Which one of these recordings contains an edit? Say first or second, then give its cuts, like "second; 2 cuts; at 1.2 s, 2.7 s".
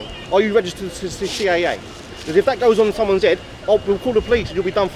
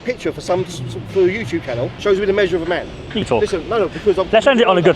second; 2 cuts; at 1.9 s, 3.3 s